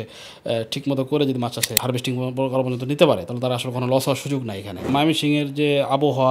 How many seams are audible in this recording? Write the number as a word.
two